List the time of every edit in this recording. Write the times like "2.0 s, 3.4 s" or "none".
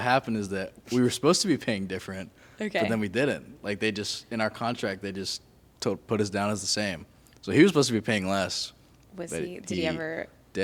none